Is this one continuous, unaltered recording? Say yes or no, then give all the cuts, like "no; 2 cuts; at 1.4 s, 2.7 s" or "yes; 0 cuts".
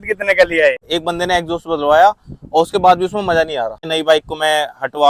no; 2 cuts; at 0.9 s, 3.8 s